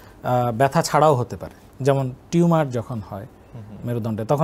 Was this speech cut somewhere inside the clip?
no; 0 cuts

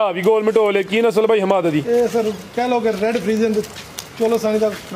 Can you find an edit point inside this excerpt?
no; 0 cuts

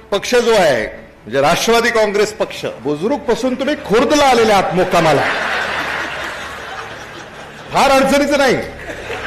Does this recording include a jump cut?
yes; 1 cut; at 2.8 s

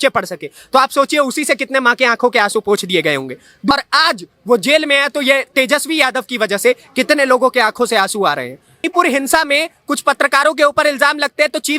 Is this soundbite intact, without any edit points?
no; 2 cuts; at 3.7 s, 8.8 s

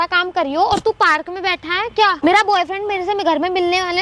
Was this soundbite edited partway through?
yes; 1 cut; at 2.2 s

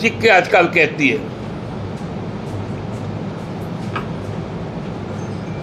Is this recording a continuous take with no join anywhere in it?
yes; 0 cuts

